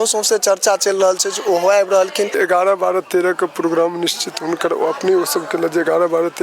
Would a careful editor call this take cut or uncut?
cut